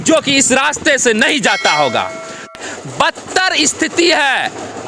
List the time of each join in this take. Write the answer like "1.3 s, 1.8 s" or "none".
2.5 s